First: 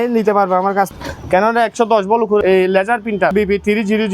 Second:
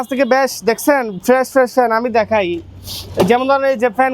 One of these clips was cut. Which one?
first; 3 cuts; at 0.9 s, 2.4 s, 3.3 s

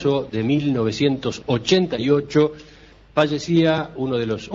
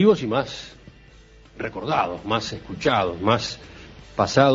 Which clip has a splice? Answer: second; 1 cut; at 2.7 s

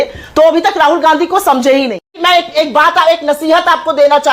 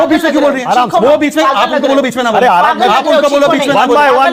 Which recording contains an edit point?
first; 1 cut; at 2.1 s

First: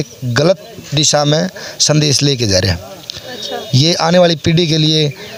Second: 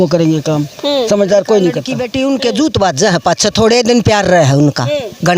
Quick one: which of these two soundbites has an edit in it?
second; 1 cut; at 1.9 s

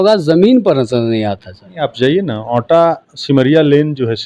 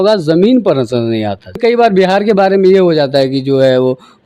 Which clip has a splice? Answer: second; 1 cut; at 1.6 s

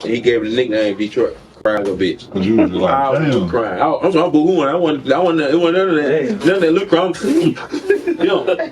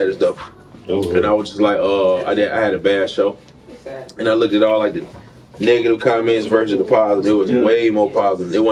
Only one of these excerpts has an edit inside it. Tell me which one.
first; 1 cut; at 1.6 s

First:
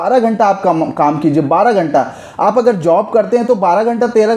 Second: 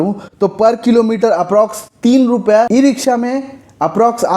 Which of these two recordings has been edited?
second; 1 cut; at 2.7 s

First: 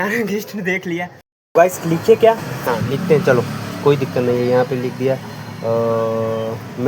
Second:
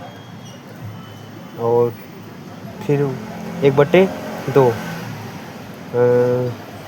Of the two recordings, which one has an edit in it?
first; 1 cut; at 1.5 s

